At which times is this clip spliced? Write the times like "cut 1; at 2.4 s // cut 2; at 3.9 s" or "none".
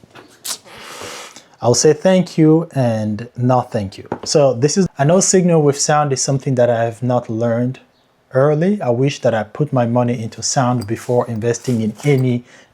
cut 1; at 4.8 s

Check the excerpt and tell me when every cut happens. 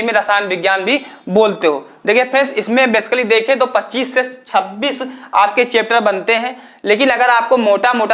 none

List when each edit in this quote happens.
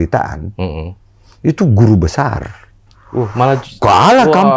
none

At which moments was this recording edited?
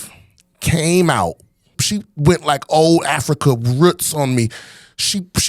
cut 1; at 1.8 s

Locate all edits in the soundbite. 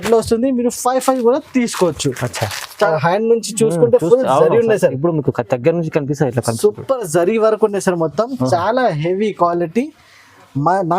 cut 1; at 2.9 s

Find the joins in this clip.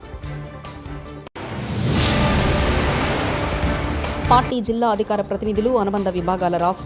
none

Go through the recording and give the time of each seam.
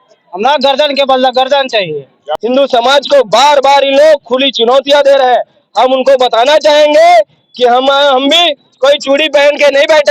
cut 1; at 2.2 s

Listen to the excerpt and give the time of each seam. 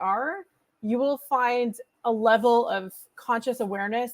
cut 1; at 1.9 s

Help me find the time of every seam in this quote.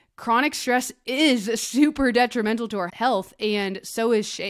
cut 1; at 2.9 s

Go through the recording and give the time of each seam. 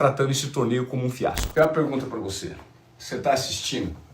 cut 1; at 1.4 s

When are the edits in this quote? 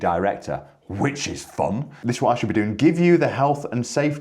cut 1; at 1.9 s

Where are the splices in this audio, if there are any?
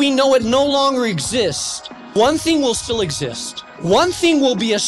cut 1; at 2.1 s // cut 2; at 3.7 s

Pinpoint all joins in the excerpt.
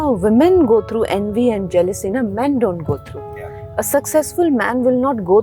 none

